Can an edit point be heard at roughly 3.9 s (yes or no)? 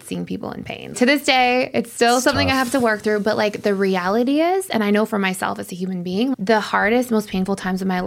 no